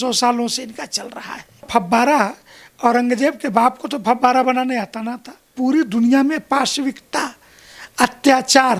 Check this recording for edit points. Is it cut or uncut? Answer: cut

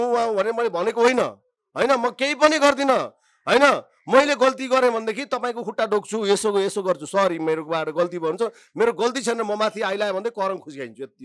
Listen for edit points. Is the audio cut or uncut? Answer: uncut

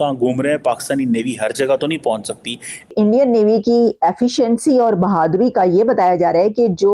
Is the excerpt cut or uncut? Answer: cut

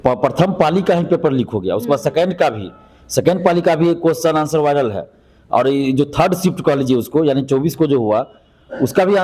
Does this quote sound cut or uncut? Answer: uncut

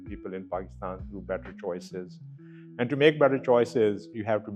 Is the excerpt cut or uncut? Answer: uncut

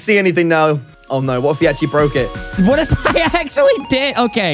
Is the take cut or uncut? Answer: cut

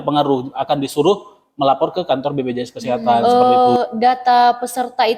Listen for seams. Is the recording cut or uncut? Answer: cut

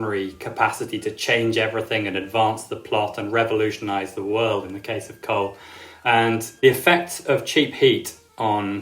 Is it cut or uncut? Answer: cut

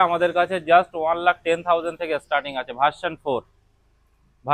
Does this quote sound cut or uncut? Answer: uncut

